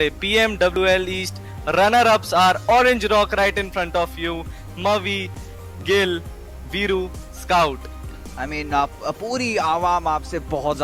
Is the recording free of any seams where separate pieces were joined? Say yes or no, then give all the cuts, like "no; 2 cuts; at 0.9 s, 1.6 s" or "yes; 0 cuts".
yes; 0 cuts